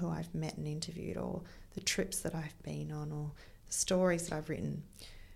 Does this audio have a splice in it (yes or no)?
no